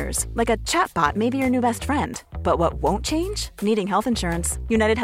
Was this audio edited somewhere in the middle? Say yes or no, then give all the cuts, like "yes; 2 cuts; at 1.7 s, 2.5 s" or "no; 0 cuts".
no; 0 cuts